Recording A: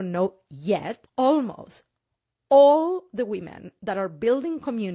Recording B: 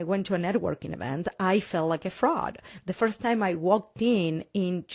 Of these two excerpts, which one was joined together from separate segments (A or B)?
A